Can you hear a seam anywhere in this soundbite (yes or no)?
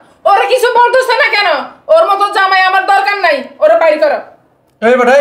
no